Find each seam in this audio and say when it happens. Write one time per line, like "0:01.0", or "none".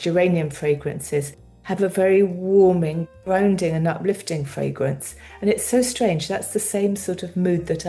0:03.1